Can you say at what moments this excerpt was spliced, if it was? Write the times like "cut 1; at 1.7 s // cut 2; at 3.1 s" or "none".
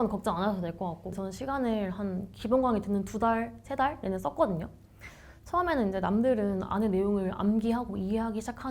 cut 1; at 1.2 s